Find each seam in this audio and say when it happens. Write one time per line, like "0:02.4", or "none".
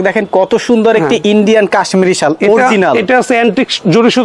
none